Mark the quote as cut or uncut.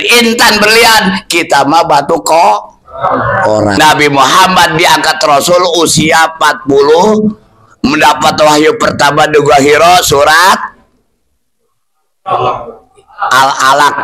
cut